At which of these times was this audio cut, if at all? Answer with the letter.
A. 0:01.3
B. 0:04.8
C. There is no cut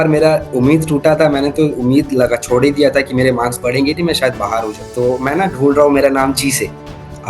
B